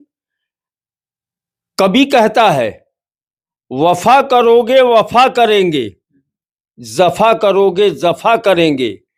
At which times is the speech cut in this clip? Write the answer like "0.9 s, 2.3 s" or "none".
none